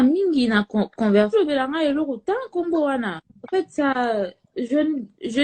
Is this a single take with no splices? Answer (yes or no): yes